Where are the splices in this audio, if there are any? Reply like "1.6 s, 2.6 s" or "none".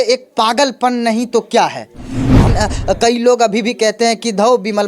2.4 s